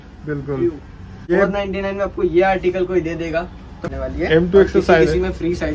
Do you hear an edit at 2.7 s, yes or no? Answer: no